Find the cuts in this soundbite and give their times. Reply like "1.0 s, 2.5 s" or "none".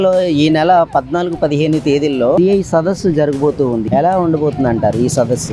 3.9 s